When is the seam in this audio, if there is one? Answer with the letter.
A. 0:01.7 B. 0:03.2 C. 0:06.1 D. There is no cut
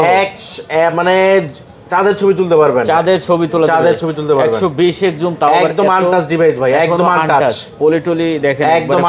D